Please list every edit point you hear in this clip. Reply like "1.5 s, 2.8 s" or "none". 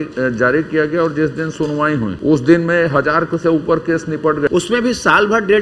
2.1 s, 4.5 s